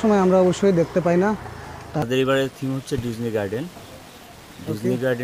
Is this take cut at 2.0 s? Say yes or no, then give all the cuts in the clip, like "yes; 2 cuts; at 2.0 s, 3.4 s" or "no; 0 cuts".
yes; 1 cut; at 2.0 s